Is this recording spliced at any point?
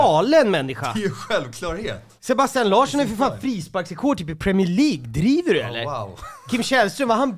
no; 0 cuts

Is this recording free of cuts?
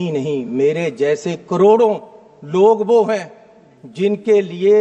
yes; 0 cuts

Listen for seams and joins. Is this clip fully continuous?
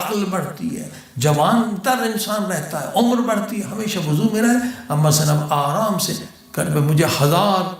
yes; 0 cuts

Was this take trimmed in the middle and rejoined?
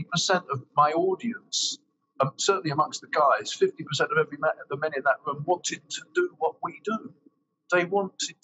no; 0 cuts

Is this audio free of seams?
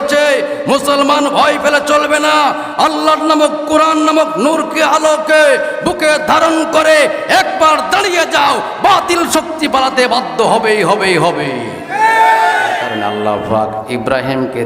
no; 1 cut; at 12.9 s

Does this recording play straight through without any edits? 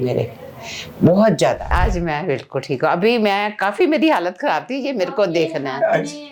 no; 1 cut; at 1.7 s

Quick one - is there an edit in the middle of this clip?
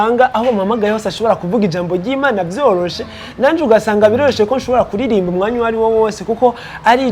no; 0 cuts

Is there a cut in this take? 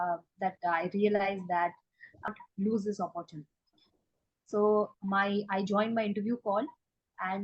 yes; 1 cut; at 2.3 s

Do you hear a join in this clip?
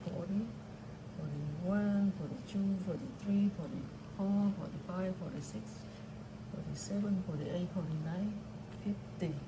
no; 0 cuts

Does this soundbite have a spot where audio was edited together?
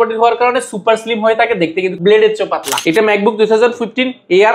yes; 2 cuts; at 1.9 s, 2.7 s

